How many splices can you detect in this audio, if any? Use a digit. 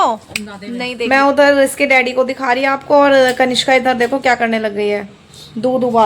1